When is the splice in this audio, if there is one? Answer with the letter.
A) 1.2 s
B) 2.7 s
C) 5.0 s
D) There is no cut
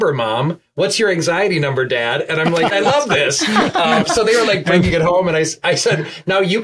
B